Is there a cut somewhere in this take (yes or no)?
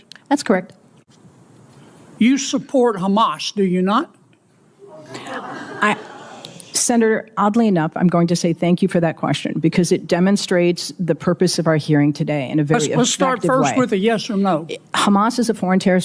yes